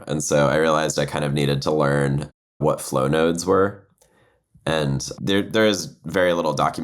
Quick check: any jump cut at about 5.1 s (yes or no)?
yes